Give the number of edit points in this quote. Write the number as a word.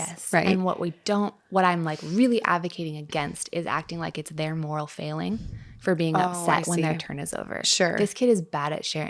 zero